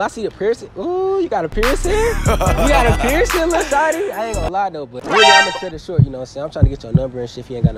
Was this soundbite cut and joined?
no; 0 cuts

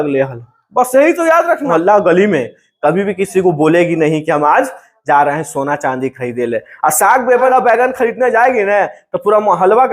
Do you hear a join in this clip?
yes; 2 cuts; at 1.7 s, 7.5 s

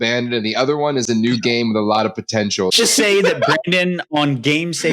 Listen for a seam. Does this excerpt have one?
yes; 1 cut; at 2.7 s

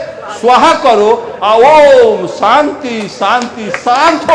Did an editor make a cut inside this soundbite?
no; 0 cuts

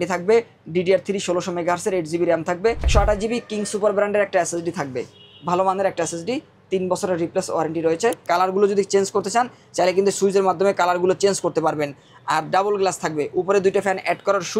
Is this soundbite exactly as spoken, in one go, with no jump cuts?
no; 2 cuts; at 2.9 s, 8.2 s

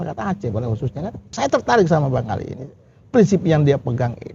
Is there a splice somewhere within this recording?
yes; 1 cut; at 1.3 s

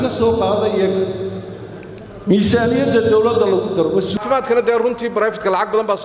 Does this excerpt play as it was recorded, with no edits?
no; 1 cut; at 4.2 s

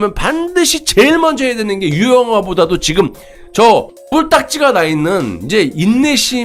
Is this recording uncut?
yes; 0 cuts

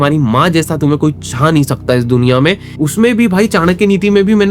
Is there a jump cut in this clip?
yes; 1 cut; at 2.7 s

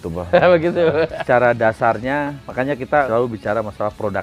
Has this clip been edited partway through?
yes; 2 cuts; at 1.2 s, 3.0 s

